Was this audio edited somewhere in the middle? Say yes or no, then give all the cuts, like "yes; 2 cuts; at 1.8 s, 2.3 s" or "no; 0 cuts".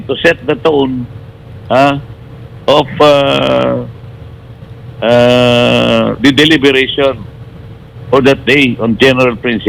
no; 0 cuts